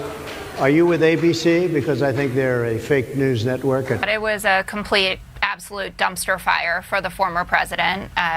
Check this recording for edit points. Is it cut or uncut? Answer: cut